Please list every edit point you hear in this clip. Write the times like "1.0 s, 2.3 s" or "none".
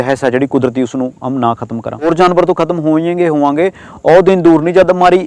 2.1 s